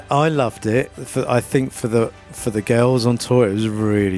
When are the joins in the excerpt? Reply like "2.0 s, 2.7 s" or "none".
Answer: 1.0 s